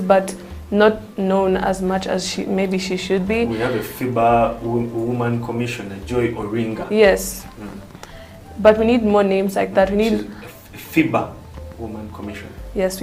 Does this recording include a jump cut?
no; 0 cuts

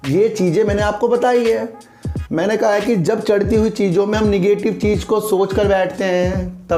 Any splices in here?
no; 0 cuts

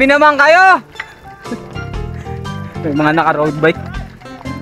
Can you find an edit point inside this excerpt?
yes; 2 cuts; at 1.6 s, 2.8 s

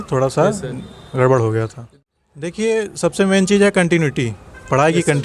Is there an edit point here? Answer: yes; 1 cut; at 1.8 s

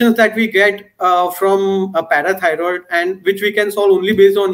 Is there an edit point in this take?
no; 0 cuts

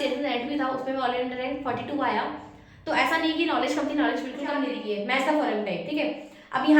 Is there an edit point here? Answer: yes; 1 cut; at 4.8 s

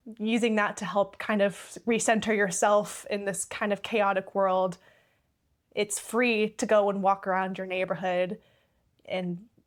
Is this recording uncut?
yes; 0 cuts

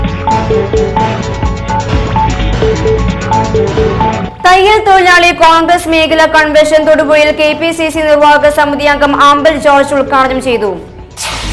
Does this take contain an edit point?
no; 0 cuts

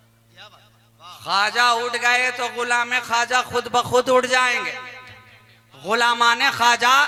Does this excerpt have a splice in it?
no; 0 cuts

